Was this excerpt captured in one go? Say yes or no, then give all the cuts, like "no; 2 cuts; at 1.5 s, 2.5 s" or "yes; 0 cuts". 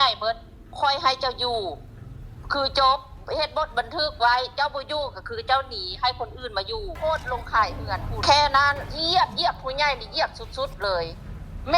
no; 3 cuts; at 6.9 s, 8.1 s, 8.9 s